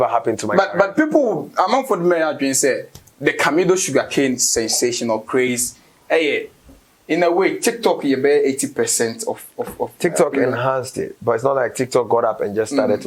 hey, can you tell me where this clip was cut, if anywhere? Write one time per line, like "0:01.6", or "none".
none

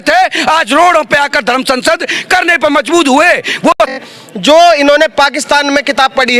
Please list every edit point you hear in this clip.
0:03.8

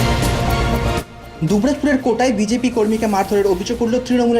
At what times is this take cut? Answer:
0:01.2

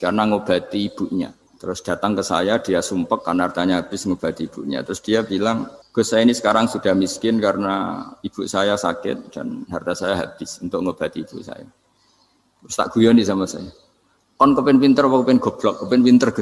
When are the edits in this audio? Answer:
0:01.5
0:05.8

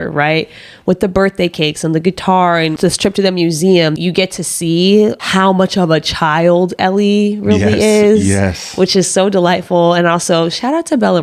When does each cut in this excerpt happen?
0:02.7
0:04.0

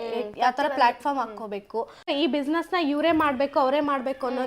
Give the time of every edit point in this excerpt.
0:02.1

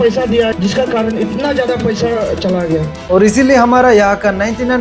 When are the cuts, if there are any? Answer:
0:02.9

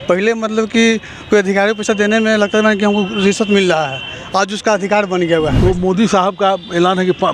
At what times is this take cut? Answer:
0:05.5

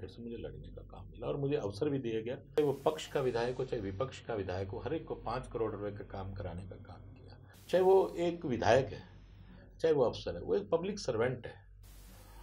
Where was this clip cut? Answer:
0:02.6
0:07.5

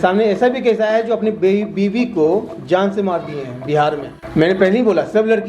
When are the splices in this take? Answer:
0:04.1

